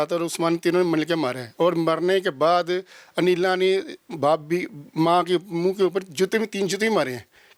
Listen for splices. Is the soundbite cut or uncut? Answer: uncut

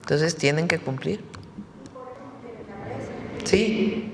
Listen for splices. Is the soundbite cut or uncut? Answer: cut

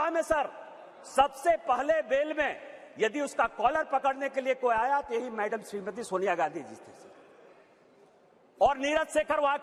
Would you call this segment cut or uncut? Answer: uncut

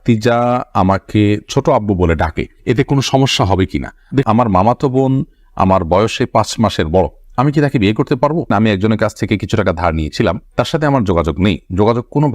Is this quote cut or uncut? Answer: cut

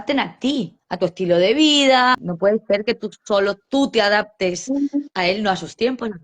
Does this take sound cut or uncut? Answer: cut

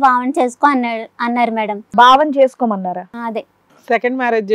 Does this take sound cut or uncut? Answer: cut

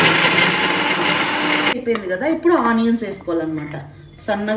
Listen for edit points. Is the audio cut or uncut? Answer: cut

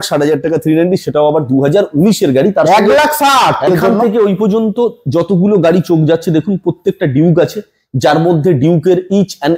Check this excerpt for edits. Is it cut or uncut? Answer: cut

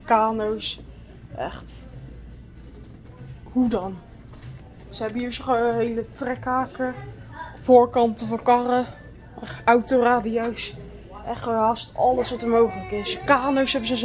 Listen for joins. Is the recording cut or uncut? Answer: uncut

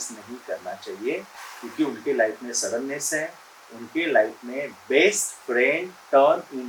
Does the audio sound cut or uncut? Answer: uncut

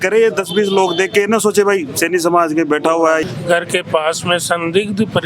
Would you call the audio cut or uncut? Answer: cut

